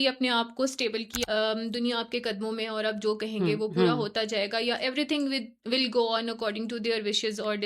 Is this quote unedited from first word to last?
no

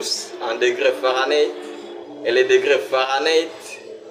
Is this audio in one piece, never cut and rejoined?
yes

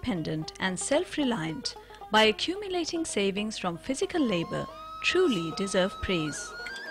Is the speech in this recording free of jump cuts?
no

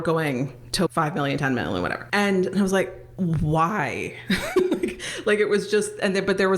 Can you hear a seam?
yes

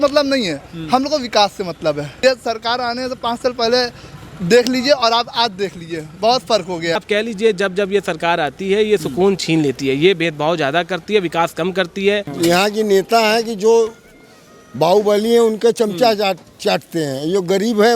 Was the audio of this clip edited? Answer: yes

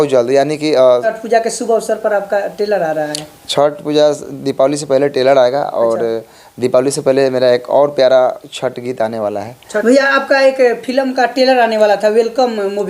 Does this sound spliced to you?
yes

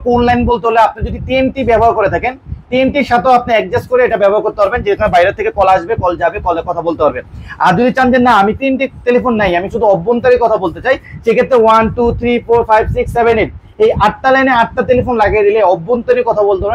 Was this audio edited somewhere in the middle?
no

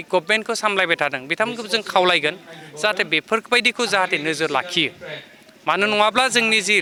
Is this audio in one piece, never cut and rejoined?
yes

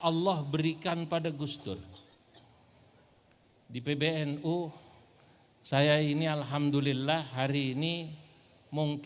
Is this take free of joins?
yes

